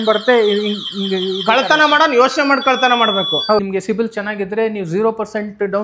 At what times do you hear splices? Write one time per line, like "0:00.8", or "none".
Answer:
0:03.6